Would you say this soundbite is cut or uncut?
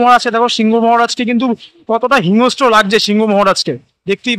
uncut